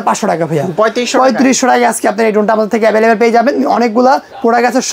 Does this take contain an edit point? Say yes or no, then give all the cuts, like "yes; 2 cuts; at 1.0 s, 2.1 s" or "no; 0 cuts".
no; 0 cuts